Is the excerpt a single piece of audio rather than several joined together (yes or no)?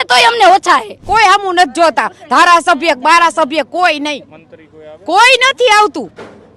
no